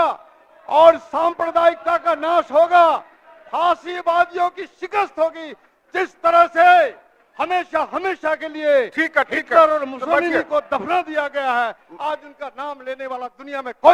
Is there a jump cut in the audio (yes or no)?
no